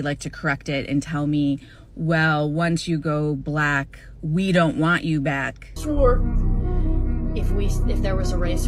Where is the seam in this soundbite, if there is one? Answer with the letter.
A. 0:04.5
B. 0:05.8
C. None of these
B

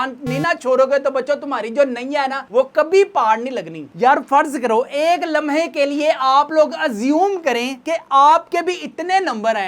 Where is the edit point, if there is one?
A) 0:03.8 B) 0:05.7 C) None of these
A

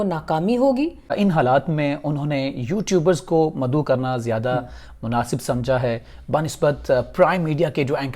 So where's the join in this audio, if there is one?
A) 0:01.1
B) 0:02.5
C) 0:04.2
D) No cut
A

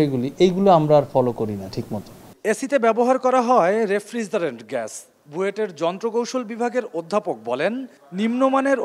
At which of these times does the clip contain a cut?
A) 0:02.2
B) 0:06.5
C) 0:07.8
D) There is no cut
D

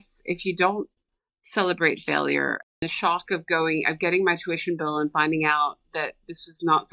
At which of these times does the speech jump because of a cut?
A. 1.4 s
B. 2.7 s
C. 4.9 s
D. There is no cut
B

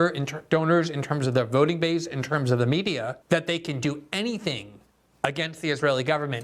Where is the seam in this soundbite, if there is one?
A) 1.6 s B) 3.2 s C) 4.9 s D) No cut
B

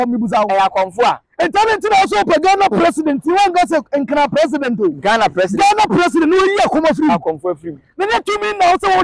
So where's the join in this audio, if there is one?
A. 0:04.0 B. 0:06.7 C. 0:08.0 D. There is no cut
D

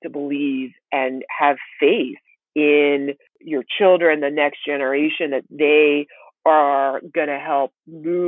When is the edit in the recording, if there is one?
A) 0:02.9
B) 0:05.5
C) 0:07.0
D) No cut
D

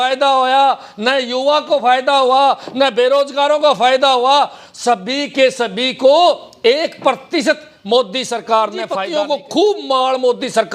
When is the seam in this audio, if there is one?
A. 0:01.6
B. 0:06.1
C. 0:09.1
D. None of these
C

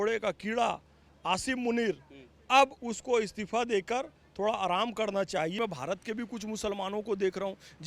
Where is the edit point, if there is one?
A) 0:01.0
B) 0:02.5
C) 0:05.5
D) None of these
C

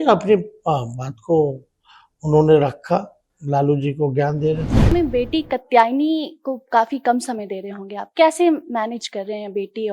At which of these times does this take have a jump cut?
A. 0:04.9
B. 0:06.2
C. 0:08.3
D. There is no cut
A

